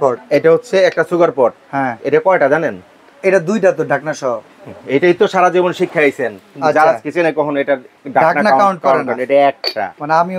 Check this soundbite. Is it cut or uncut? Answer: uncut